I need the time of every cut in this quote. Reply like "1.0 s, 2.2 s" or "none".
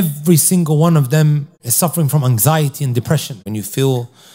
1.6 s, 3.4 s

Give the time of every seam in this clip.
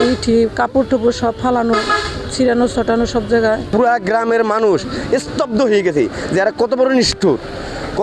3.7 s

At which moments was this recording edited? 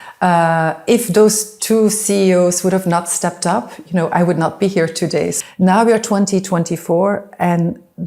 5.3 s

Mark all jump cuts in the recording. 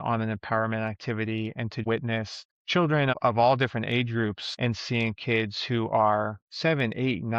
4.6 s

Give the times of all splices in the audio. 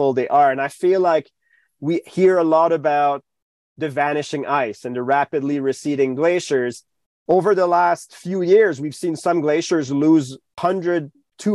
6.8 s, 10.6 s

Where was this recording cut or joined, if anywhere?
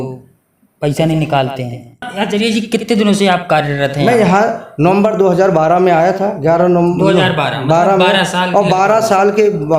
2.1 s

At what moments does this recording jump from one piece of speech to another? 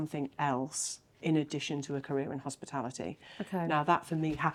none

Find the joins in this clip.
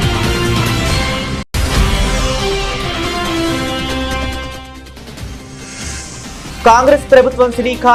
none

